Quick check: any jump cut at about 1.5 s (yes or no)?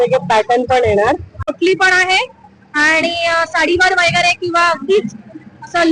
yes